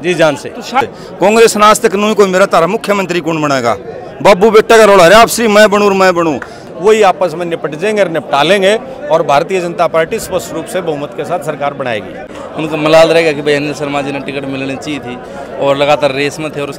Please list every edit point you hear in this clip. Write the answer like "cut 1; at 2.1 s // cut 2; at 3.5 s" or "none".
cut 1; at 0.8 s // cut 2; at 6.6 s // cut 3; at 12.4 s